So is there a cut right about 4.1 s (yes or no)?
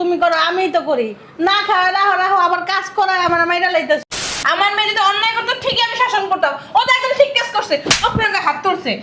yes